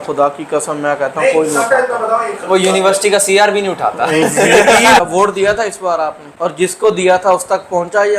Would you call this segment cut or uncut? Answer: cut